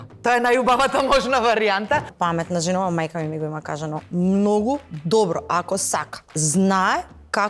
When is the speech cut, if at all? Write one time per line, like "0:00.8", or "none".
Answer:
0:02.5